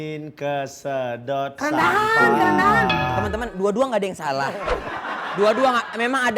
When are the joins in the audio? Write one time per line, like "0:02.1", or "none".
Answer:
0:03.2